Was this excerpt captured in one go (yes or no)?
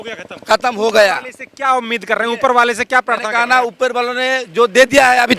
yes